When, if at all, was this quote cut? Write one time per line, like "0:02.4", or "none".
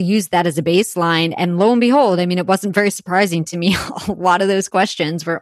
none